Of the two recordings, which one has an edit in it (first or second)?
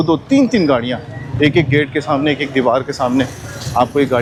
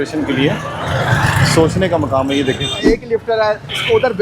second